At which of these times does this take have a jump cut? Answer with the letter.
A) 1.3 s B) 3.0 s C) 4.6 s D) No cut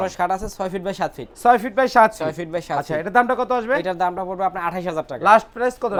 D